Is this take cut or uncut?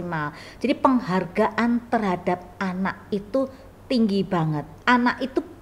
cut